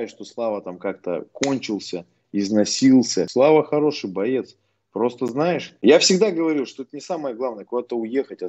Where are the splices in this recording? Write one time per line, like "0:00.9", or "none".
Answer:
0:03.2
0:05.7